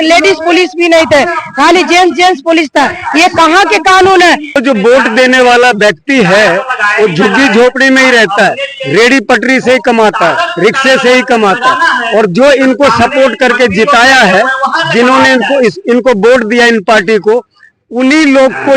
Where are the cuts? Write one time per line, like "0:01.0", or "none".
0:04.6